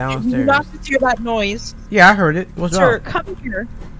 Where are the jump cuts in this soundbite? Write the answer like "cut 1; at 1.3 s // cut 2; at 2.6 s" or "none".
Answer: none